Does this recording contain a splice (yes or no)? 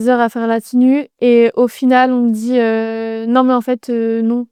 no